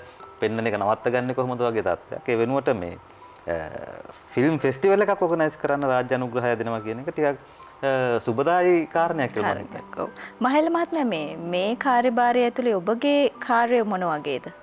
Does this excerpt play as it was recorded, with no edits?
yes; 0 cuts

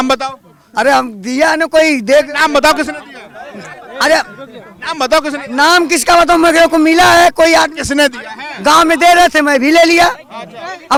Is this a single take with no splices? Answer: yes; 0 cuts

